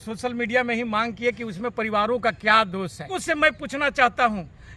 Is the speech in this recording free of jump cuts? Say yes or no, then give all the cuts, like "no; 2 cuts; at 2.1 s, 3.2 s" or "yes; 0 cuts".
no; 1 cut; at 3.2 s